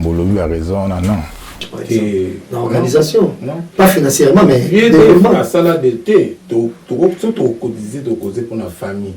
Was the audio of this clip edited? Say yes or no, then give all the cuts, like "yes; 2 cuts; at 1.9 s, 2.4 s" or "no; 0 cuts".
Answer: yes; 1 cut; at 1.7 s